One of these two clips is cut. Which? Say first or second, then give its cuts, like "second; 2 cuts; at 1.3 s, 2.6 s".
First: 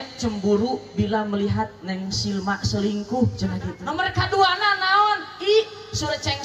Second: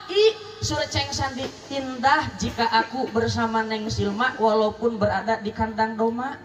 first; 1 cut; at 3.8 s